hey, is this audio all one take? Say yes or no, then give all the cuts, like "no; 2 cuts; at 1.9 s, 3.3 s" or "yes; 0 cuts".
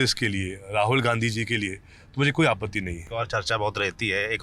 no; 1 cut; at 3.0 s